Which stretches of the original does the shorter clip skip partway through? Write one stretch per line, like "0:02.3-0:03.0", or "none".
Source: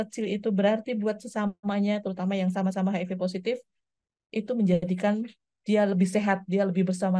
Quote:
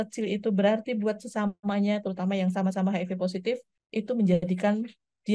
0:03.7-0:04.1